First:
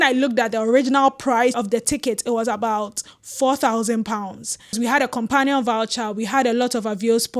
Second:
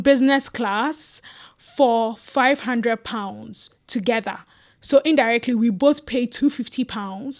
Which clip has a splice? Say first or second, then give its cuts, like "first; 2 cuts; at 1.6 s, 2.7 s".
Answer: first; 2 cuts; at 1.5 s, 4.8 s